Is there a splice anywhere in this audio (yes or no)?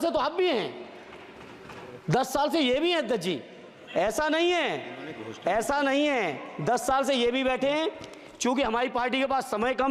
no